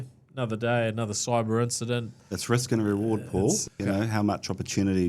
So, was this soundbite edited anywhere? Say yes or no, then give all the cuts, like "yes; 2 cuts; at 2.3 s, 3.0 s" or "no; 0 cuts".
yes; 2 cuts; at 2.1 s, 3.8 s